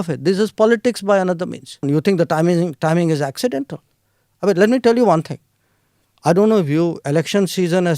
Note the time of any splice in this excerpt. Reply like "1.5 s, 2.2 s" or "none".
1.8 s